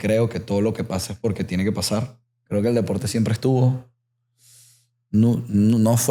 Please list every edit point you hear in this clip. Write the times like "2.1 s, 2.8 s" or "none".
2.3 s